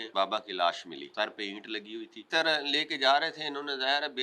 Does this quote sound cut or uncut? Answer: cut